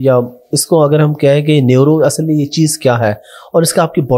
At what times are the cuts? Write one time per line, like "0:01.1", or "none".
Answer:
none